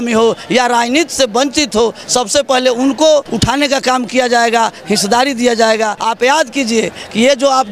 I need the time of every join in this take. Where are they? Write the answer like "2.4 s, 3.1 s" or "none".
3.3 s, 6.0 s